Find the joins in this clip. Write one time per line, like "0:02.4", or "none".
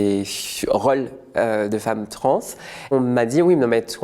0:02.8